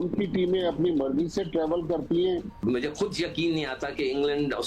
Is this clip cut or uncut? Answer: cut